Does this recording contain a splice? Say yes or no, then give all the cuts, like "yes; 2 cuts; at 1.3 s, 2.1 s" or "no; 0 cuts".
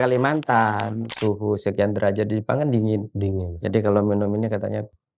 yes; 1 cut; at 1.1 s